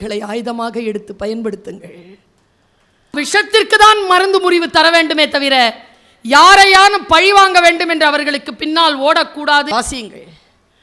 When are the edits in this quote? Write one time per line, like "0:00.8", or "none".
0:03.1
0:09.7